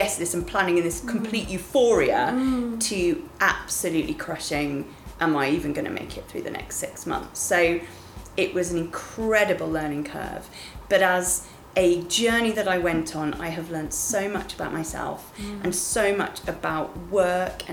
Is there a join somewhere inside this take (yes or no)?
no